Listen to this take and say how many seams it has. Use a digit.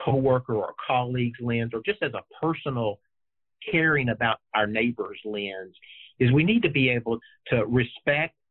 1